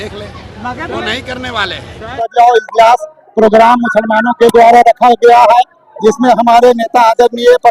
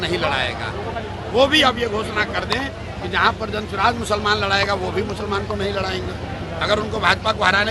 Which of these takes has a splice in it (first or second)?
first